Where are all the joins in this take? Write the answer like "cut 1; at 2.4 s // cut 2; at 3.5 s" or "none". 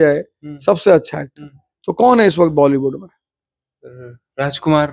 none